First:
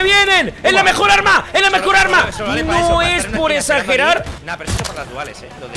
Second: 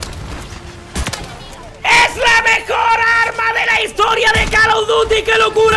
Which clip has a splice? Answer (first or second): first